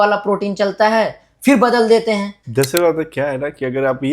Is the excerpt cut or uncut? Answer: cut